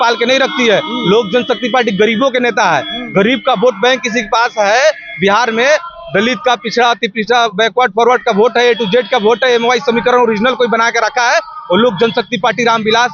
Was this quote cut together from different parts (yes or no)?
no